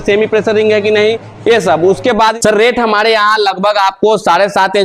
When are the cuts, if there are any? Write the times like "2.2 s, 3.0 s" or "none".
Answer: 2.3 s